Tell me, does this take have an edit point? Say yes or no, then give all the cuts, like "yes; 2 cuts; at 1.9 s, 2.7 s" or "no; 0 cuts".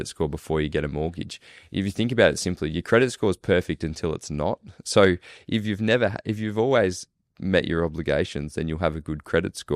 no; 0 cuts